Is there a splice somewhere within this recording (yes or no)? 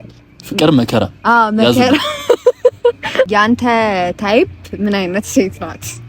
yes